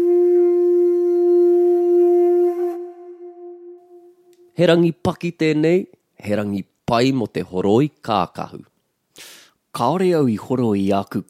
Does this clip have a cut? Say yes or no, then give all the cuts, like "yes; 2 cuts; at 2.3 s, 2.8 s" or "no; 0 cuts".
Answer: yes; 1 cut; at 4.3 s